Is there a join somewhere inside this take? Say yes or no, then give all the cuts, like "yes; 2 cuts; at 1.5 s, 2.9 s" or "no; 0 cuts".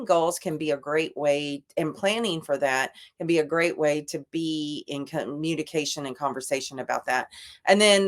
no; 0 cuts